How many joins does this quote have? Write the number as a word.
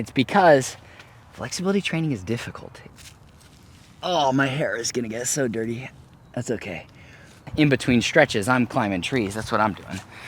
two